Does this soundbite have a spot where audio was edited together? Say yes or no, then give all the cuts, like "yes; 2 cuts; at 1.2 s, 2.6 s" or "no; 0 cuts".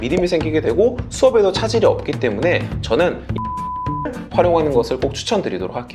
no; 0 cuts